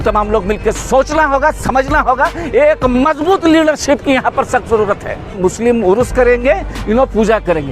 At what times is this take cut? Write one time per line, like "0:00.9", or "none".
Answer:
0:05.3

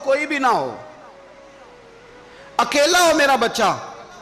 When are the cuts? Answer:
none

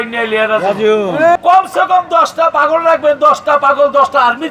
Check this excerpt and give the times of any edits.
0:01.4

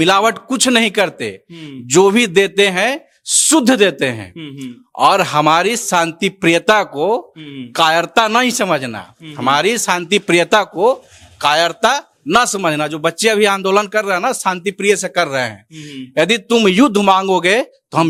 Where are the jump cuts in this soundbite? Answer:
none

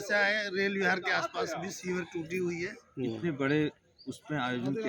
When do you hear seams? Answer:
0:02.8

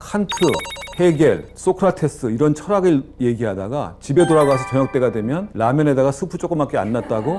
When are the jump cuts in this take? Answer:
0:01.5
0:05.5

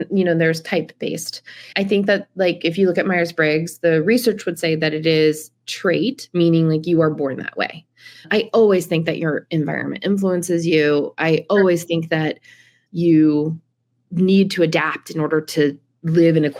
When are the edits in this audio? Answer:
none

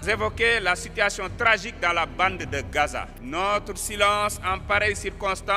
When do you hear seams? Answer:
0:03.0

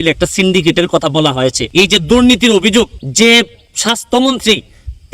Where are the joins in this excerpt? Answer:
0:01.6
0:02.9

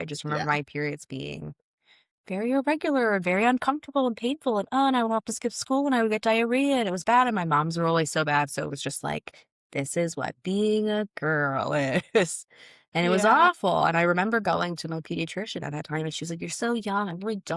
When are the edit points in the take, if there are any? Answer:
none

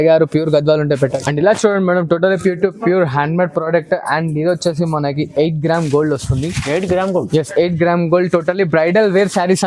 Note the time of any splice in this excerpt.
0:01.2

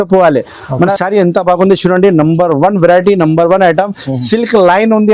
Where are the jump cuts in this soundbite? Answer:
0:00.9

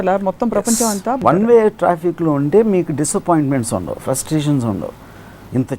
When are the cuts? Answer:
0:01.2

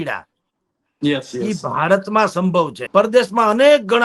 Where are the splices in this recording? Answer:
0:02.8

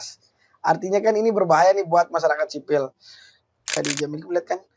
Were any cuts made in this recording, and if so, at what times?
0:03.7

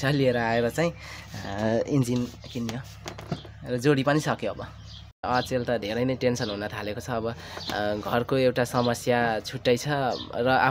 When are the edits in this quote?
0:05.2

